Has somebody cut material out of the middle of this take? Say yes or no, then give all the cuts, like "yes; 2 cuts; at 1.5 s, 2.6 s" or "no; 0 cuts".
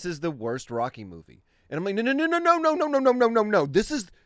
no; 0 cuts